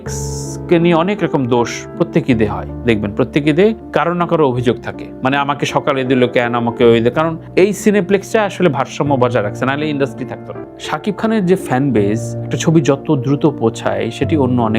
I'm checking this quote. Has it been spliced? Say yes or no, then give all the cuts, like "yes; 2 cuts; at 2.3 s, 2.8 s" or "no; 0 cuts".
yes; 1 cut; at 10.7 s